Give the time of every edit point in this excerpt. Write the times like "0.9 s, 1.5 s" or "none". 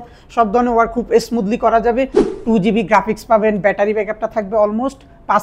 2.2 s

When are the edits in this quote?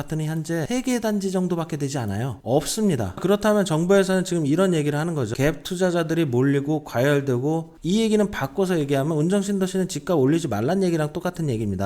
3.1 s, 7.7 s

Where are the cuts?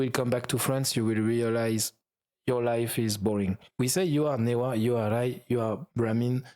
3.6 s

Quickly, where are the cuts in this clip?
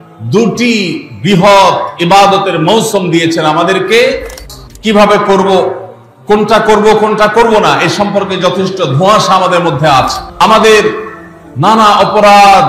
4.3 s, 10.3 s

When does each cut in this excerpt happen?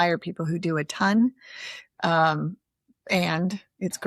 none

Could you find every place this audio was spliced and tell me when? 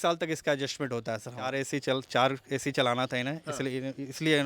1.6 s

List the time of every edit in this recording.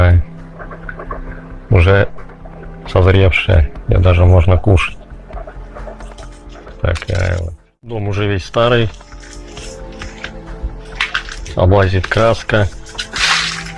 8.0 s

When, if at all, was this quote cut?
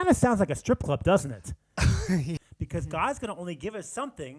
2.4 s

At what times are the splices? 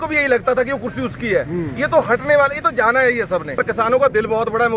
3.6 s

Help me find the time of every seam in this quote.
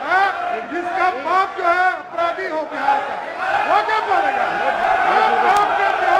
4.8 s

